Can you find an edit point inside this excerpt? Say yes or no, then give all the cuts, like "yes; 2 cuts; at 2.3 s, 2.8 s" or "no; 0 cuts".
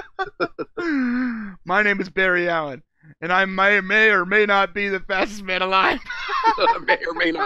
no; 0 cuts